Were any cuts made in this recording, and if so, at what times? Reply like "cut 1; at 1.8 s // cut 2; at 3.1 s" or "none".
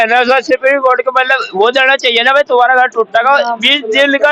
none